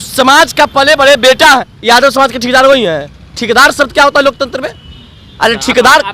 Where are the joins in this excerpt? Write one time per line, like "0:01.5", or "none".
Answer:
0:01.7